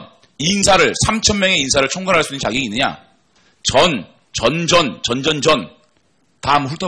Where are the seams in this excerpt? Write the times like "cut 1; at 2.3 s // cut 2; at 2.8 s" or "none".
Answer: none